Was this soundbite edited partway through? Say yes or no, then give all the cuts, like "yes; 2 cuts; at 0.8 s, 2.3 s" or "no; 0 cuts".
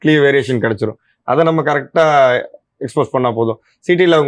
no; 0 cuts